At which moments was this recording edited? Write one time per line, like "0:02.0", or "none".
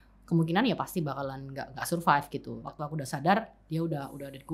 0:02.6